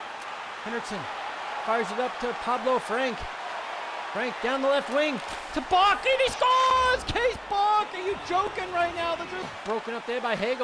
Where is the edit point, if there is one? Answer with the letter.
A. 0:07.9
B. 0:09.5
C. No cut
B